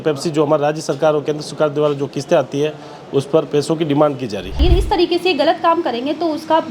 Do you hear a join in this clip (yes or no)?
yes